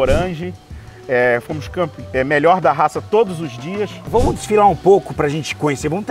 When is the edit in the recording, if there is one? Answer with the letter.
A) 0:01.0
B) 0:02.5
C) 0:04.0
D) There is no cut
C